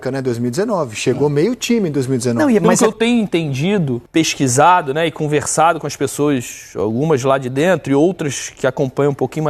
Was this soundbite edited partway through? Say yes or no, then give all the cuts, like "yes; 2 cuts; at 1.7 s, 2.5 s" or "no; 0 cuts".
yes; 2 cuts; at 2.7 s, 4.0 s